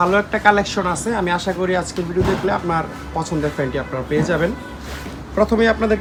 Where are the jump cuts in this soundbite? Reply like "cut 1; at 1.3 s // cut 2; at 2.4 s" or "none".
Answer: none